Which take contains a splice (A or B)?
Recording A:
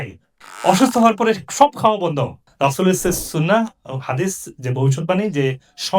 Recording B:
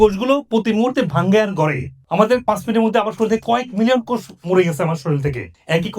B